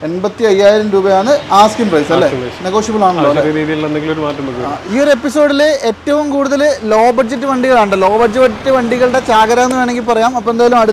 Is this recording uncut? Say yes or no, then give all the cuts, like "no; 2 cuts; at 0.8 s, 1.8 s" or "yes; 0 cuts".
no; 1 cut; at 4.8 s